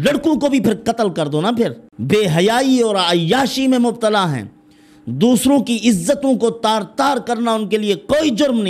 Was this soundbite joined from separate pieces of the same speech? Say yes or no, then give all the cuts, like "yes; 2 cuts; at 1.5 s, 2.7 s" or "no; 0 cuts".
yes; 1 cut; at 1.9 s